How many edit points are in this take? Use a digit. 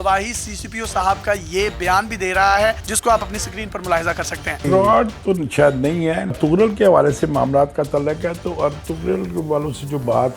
1